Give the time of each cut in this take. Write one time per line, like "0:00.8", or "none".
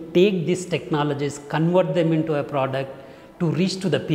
none